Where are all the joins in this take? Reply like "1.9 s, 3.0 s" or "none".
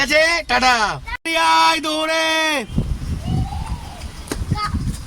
1.2 s